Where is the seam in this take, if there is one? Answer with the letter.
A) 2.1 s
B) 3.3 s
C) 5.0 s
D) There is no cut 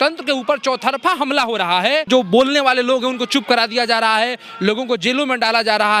A